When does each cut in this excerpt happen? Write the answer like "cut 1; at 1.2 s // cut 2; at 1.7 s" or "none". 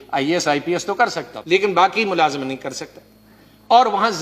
cut 1; at 1.3 s